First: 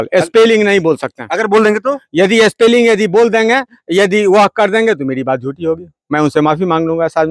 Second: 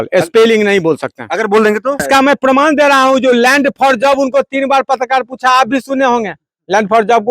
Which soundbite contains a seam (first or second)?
second